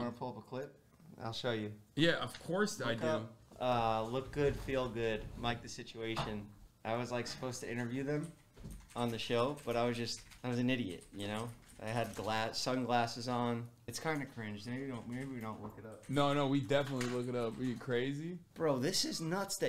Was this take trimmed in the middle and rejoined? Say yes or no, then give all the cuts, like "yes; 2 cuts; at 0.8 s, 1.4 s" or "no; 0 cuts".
yes; 1 cut; at 18.4 s